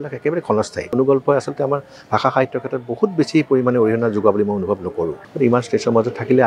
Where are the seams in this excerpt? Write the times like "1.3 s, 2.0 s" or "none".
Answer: 0.9 s, 5.2 s